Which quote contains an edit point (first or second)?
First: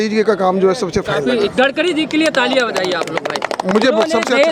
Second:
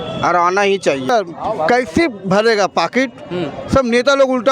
second